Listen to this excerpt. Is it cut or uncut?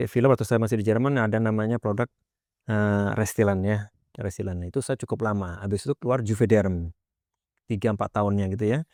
uncut